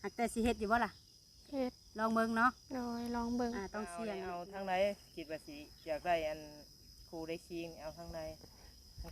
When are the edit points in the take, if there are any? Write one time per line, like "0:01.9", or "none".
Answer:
0:04.3